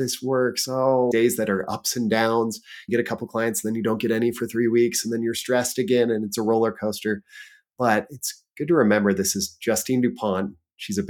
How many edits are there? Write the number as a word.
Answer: one